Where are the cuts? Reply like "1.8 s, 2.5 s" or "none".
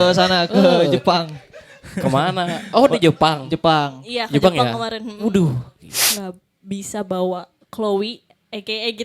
6.1 s